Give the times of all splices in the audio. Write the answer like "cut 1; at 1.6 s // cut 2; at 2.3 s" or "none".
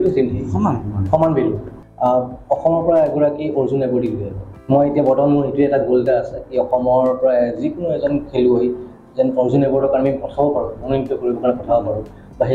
cut 1; at 1.7 s